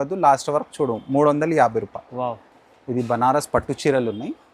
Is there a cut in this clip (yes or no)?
no